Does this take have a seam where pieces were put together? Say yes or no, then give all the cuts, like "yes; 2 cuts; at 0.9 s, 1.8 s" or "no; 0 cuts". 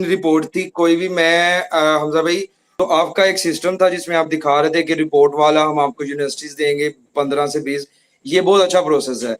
yes; 1 cut; at 2.6 s